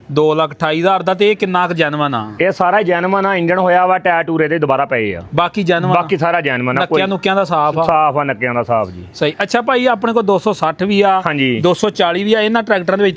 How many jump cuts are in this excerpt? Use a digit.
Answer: 0